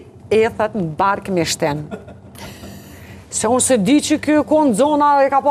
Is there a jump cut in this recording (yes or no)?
no